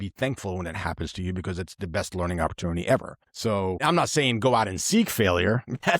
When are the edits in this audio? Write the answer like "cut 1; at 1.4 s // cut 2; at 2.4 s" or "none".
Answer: cut 1; at 3.8 s